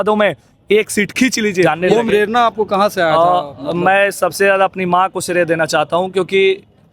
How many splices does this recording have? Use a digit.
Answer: 1